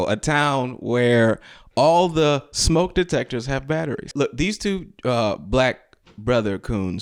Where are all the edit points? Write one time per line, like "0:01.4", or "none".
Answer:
none